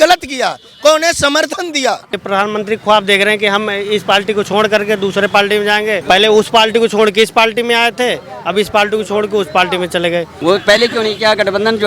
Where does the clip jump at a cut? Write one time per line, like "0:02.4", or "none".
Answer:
0:02.2
0:06.0
0:10.3